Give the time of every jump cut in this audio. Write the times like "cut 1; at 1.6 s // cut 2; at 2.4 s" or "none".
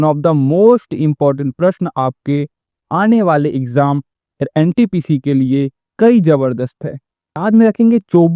cut 1; at 7.4 s